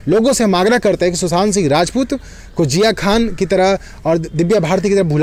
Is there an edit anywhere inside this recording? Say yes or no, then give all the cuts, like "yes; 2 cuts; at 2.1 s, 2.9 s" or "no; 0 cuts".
no; 0 cuts